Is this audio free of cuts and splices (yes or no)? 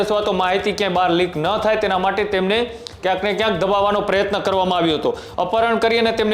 no